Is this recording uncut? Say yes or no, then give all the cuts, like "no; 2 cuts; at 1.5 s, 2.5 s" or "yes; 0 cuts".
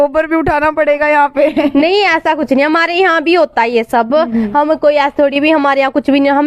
yes; 0 cuts